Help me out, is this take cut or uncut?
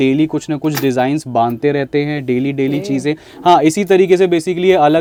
uncut